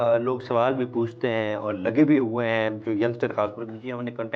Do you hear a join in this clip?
no; 0 cuts

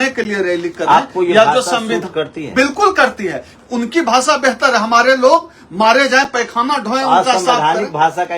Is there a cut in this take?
yes; 1 cut; at 3.5 s

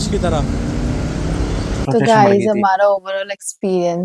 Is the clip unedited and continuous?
no; 1 cut; at 1.8 s

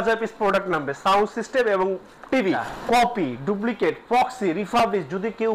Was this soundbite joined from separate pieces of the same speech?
yes; 1 cut; at 2.7 s

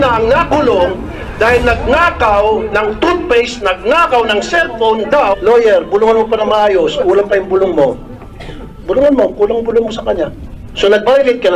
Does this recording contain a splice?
yes; 2 cuts; at 5.4 s, 10.6 s

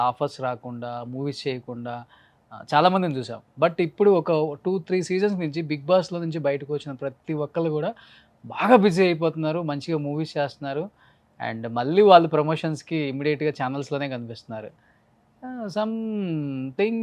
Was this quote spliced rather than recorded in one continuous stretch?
no; 0 cuts

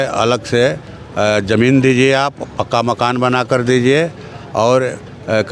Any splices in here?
no; 0 cuts

